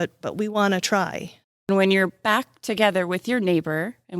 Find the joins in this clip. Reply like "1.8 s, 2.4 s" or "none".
1.7 s